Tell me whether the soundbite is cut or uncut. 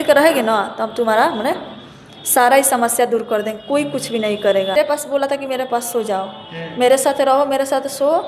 cut